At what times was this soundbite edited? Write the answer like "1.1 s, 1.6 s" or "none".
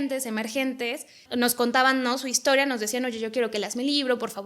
1.2 s